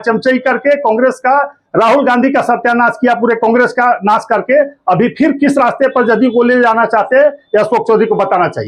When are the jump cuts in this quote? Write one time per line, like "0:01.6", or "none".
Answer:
none